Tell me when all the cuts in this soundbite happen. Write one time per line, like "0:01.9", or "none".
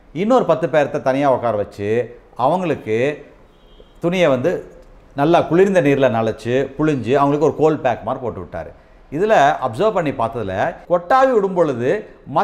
0:10.8